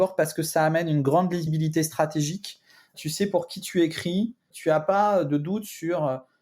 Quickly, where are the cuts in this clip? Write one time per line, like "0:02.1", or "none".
0:01.5
0:02.9
0:04.5